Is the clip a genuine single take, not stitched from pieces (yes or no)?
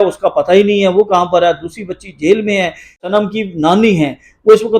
no